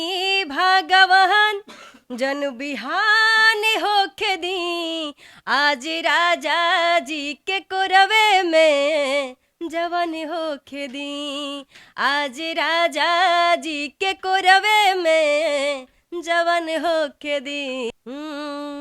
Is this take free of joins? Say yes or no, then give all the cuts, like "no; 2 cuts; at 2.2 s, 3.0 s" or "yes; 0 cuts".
no; 1 cut; at 17.9 s